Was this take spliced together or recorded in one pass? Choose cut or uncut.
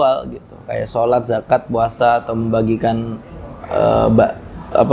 uncut